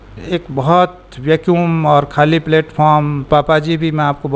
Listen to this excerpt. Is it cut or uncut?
cut